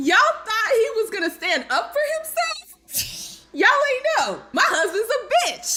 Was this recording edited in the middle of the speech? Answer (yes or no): no